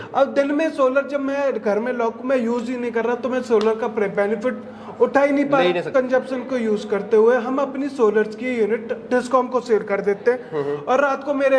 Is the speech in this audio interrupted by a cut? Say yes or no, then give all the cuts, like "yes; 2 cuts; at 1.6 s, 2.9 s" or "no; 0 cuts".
yes; 1 cut; at 5.9 s